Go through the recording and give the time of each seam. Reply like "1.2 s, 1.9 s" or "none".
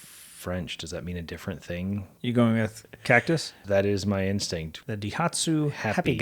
2.1 s, 3.6 s, 4.7 s